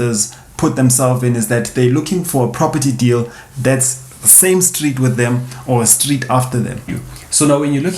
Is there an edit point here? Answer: yes; 1 cut; at 7.0 s

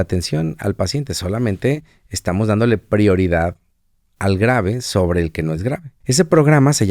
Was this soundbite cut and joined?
yes; 1 cut; at 5.9 s

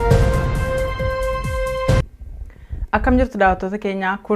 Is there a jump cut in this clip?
yes; 1 cut; at 2.2 s

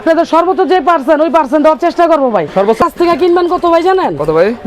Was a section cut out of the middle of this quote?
yes; 1 cut; at 2.8 s

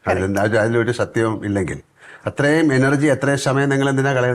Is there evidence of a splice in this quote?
no; 0 cuts

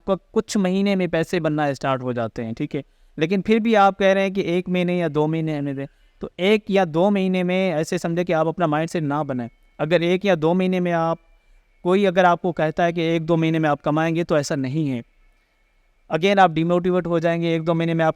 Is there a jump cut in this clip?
no; 0 cuts

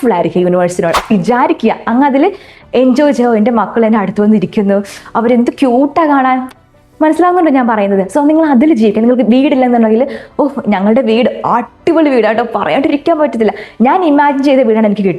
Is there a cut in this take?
yes; 1 cut; at 1.1 s

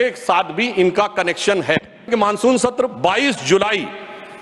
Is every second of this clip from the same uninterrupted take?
no; 1 cut; at 2.1 s

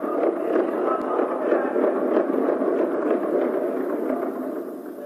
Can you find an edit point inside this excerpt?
no; 0 cuts

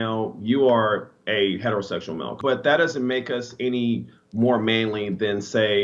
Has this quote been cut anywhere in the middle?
yes; 1 cut; at 2.3 s

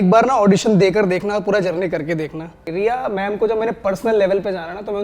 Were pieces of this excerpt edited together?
yes; 1 cut; at 2.6 s

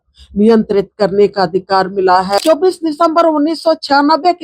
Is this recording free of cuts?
no; 1 cut; at 2.4 s

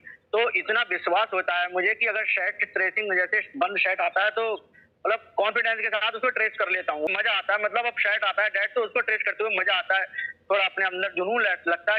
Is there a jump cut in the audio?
yes; 1 cut; at 7.1 s

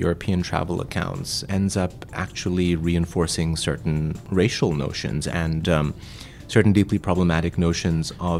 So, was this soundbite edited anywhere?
yes; 3 cuts; at 1.4 s, 4.2 s, 5.3 s

